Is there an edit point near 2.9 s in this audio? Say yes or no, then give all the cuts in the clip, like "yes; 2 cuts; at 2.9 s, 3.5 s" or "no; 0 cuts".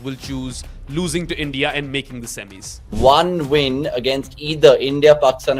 yes; 1 cut; at 2.9 s